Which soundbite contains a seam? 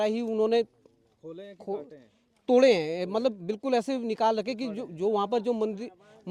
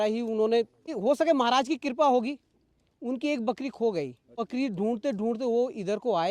second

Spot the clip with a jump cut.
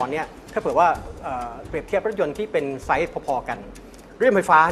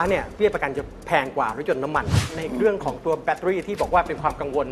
second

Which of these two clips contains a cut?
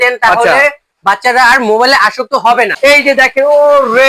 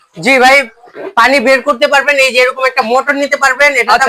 first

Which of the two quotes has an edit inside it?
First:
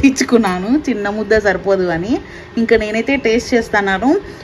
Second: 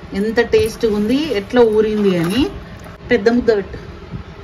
second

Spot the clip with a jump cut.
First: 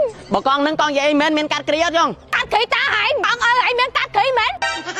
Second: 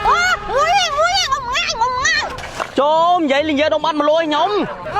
second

